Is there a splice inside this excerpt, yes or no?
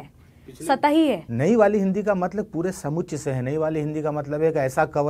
yes